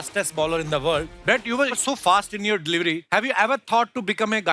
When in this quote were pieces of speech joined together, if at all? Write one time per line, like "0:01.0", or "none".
0:01.1
0:03.0

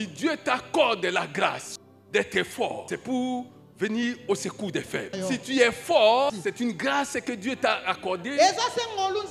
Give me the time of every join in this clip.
0:01.7
0:02.8
0:05.1
0:06.3

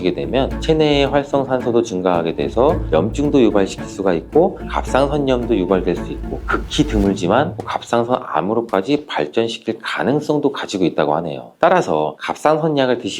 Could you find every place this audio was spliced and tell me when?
none

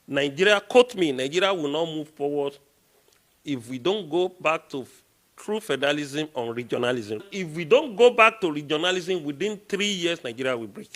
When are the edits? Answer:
0:07.2

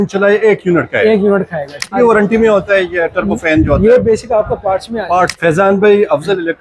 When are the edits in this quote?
0:01.9
0:05.3

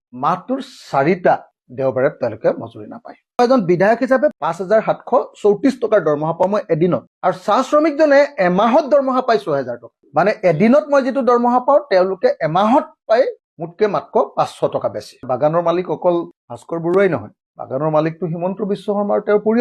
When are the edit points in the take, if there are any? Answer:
0:15.2

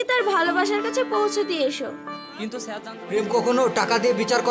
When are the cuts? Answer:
0:02.7

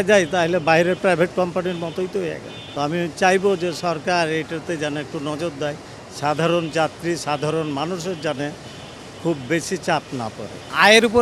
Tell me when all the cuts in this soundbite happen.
none

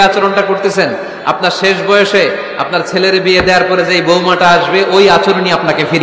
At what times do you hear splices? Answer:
none

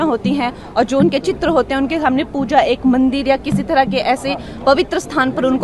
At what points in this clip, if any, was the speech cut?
none

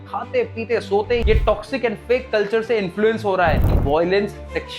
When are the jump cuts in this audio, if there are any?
0:03.8

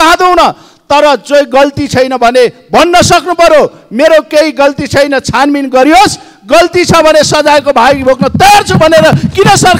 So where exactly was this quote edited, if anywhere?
none

